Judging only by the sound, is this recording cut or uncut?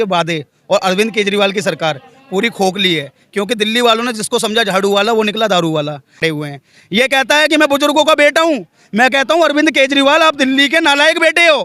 cut